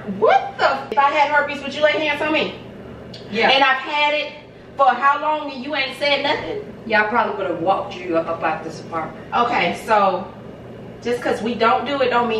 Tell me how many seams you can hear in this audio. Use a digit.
1